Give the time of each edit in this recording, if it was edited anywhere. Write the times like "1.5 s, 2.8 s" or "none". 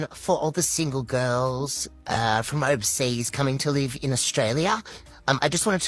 none